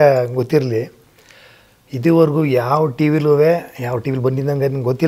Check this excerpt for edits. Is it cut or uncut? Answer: uncut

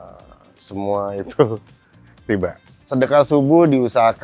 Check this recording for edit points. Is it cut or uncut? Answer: cut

